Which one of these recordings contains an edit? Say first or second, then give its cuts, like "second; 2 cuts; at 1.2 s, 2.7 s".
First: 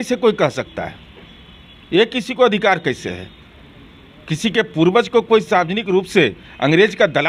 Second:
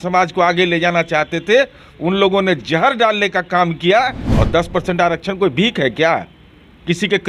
second; 1 cut; at 4.2 s